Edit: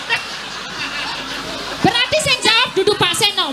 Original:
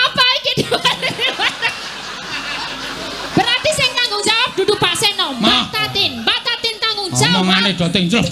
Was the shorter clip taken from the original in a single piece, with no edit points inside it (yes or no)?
no